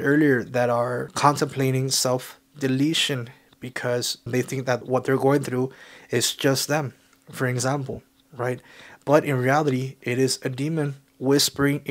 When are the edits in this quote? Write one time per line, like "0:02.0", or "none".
0:01.1
0:04.7